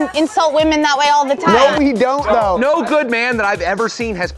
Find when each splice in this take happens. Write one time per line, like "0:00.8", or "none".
0:02.6